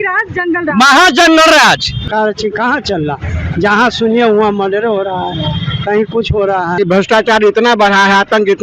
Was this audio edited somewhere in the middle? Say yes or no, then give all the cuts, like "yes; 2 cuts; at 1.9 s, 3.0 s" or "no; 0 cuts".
yes; 2 cuts; at 2.0 s, 6.7 s